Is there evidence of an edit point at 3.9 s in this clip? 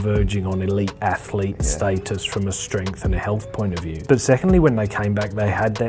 yes; 1 cut; at 3.9 s

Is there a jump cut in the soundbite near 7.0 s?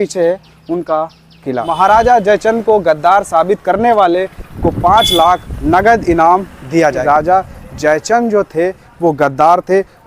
yes; 3 cuts; at 1.7 s, 5.5 s, 7.0 s

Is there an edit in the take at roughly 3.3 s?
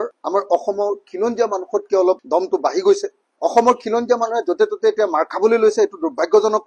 no; 0 cuts

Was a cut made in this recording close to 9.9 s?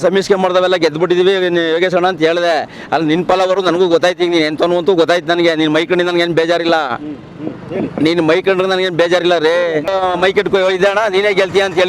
yes; 1 cut; at 9.9 s

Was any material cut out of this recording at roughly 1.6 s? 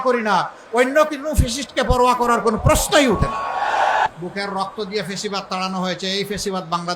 no; 1 cut; at 4.1 s

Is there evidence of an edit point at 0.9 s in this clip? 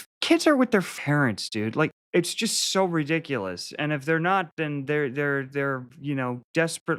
yes; 1 cut; at 0.9 s

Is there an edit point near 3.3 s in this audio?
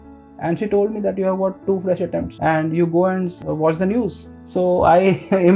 yes; 2 cuts; at 2.3 s, 3.3 s

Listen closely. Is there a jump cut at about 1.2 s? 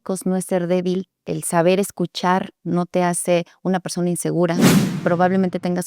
yes; 2 cuts; at 1.2 s, 4.7 s

